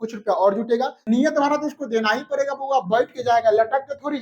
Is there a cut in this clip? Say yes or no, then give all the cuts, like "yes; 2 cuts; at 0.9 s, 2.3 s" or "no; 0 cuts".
yes; 1 cut; at 1.0 s